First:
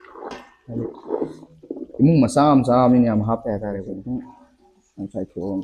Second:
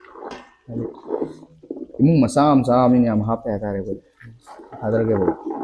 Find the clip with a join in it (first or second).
first